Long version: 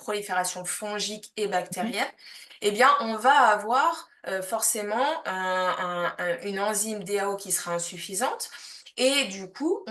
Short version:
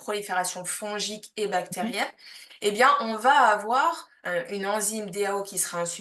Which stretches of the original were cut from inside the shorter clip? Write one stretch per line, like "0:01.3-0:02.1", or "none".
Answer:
0:04.2-0:06.1

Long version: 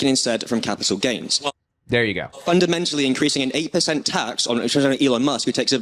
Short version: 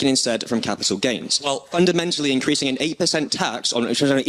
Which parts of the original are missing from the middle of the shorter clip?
0:01.6-0:02.3

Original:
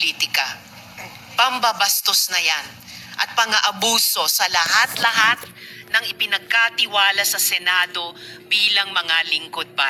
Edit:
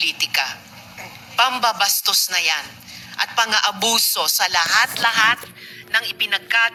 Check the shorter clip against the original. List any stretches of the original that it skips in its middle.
none

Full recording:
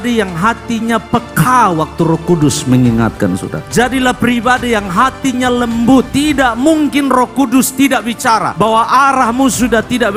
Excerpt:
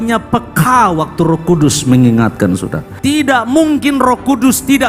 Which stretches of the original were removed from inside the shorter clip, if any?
0:03.7-0:06.0

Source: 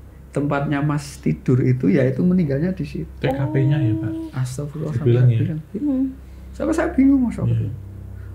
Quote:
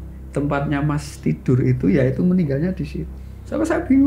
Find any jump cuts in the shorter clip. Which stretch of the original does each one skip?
0:03.1-0:06.2

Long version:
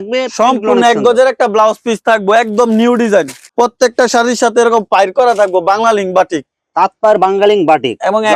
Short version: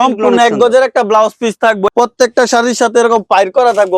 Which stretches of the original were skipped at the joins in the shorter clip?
0:02.3-0:03.5

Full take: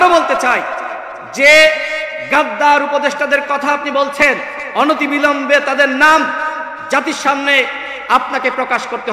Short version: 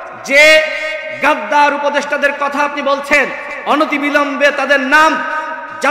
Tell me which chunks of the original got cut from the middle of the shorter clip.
none

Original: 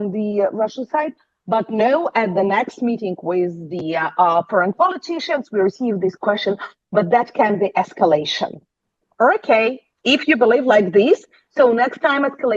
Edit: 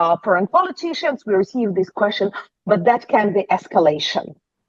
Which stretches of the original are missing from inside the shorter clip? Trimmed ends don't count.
none

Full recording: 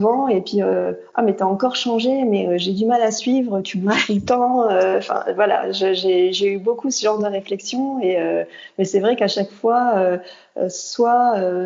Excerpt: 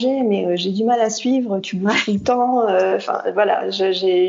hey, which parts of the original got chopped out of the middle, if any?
none

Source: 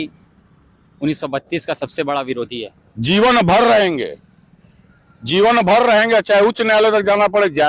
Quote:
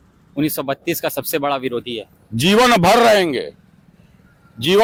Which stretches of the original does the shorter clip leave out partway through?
none

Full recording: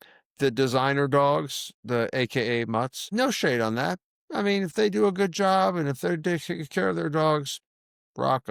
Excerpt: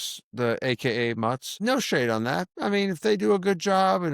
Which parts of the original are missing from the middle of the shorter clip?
0:03.9-0:04.1

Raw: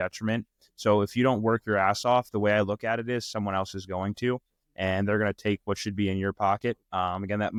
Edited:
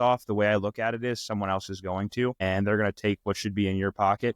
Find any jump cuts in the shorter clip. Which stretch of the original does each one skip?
0:04.4-0:04.8

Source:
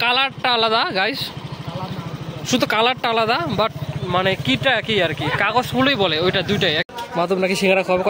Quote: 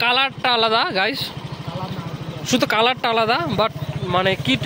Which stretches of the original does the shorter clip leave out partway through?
none

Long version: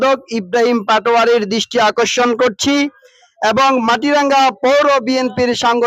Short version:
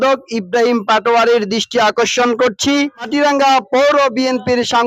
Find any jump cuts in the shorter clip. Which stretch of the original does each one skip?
0:03.1-0:04.0

